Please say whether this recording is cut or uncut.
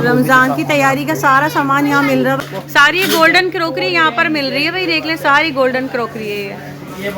cut